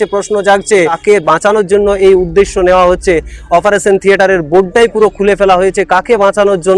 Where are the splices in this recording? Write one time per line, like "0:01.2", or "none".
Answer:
0:01.0

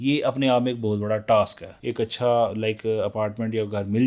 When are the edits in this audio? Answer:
0:01.8

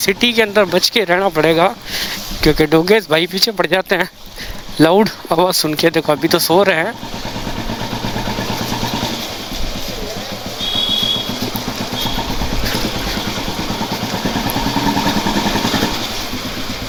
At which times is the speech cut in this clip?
none

